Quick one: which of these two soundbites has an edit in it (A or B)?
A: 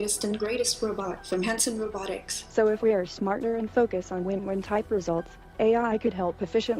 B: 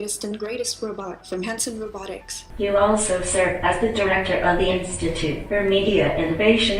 B